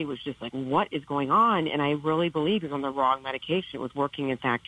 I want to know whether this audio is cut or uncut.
uncut